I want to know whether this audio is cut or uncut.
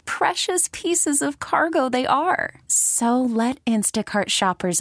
uncut